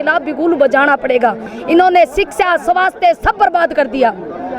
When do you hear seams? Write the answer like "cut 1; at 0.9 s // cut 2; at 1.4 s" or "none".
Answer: cut 1; at 1.5 s